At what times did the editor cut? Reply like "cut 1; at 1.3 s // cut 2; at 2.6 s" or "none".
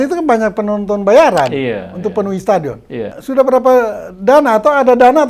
cut 1; at 3.2 s